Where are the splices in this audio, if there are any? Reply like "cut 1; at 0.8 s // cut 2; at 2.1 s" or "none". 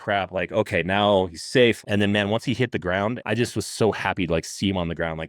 cut 1; at 1.8 s // cut 2; at 3.2 s